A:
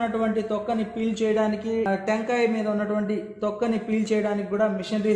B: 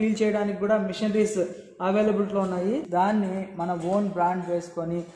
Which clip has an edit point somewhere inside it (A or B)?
B